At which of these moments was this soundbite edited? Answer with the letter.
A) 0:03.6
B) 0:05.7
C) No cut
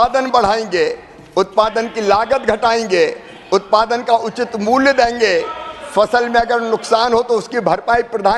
C